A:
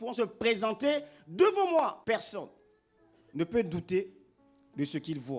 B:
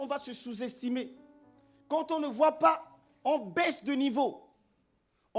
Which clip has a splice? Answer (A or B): A